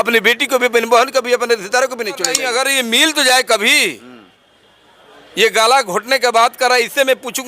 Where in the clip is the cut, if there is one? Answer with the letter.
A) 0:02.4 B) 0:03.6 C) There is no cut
A